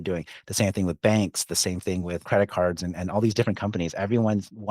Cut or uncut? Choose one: cut